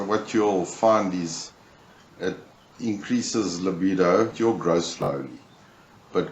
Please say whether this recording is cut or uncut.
cut